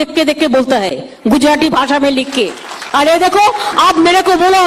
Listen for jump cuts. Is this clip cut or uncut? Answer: uncut